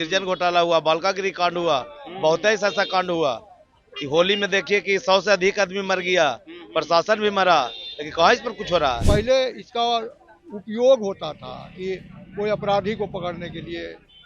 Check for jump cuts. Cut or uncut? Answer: cut